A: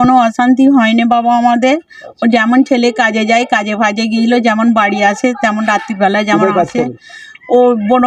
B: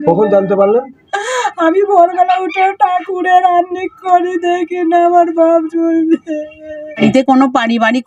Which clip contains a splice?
B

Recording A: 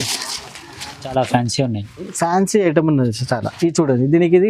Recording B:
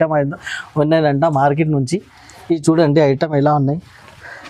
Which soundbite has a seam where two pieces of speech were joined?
A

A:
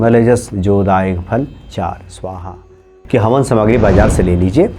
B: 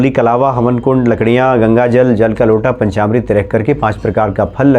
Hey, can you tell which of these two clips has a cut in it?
A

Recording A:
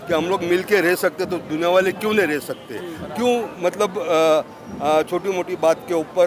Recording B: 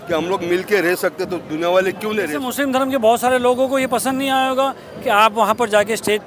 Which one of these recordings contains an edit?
B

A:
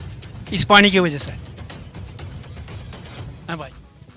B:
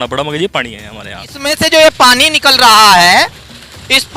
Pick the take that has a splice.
B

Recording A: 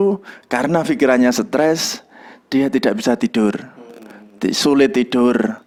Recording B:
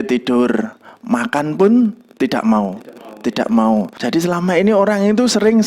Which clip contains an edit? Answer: B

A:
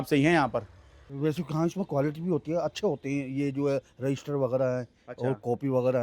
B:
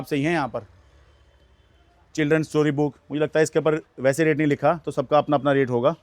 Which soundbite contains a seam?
A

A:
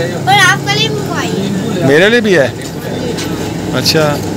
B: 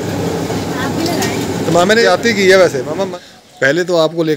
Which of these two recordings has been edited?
B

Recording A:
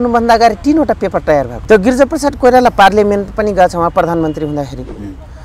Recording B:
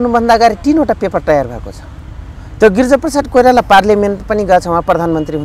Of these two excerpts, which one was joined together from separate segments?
A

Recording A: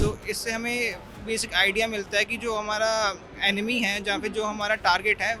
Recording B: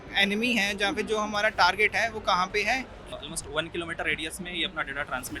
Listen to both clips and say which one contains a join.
B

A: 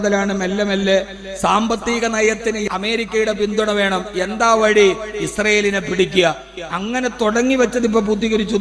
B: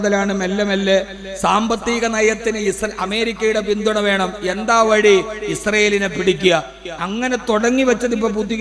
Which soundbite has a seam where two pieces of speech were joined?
A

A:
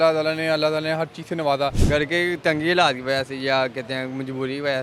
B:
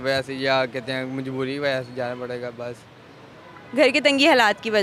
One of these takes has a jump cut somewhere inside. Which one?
A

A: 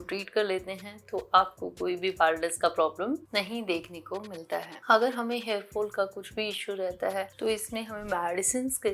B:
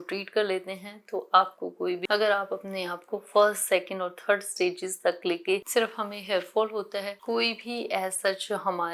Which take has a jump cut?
B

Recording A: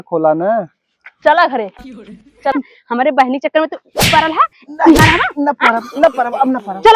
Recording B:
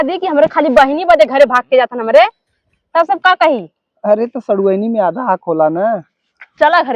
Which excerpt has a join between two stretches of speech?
A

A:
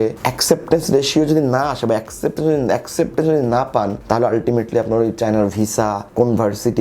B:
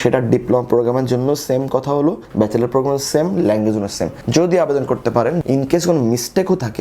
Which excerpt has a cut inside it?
B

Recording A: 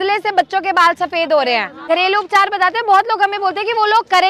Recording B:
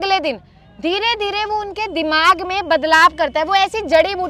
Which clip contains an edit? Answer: A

